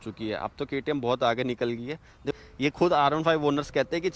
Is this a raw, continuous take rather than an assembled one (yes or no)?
no